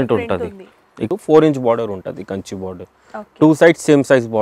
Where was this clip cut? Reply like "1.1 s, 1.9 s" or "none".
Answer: 1.1 s